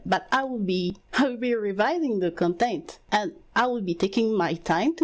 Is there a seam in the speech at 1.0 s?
yes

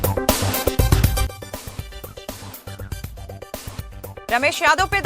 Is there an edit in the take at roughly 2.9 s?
yes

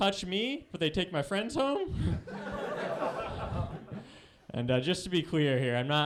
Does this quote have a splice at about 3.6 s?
no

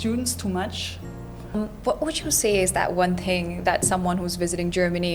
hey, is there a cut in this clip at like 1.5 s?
yes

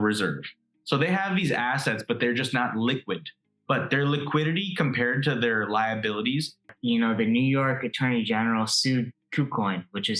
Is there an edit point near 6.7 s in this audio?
yes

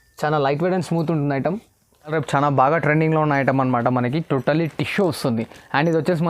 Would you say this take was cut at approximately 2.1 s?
yes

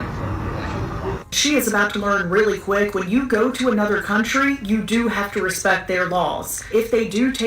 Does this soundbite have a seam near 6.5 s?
yes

